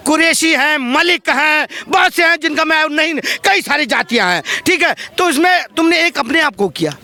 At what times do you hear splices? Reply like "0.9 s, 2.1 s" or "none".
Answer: none